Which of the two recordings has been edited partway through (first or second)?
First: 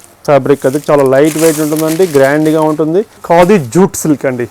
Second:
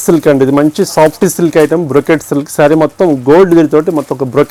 first